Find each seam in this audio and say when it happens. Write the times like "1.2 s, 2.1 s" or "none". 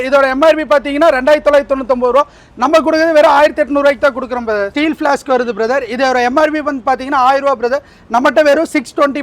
4.7 s